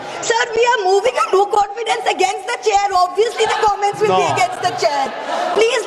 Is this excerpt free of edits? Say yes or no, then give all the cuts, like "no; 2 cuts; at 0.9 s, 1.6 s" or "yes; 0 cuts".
yes; 0 cuts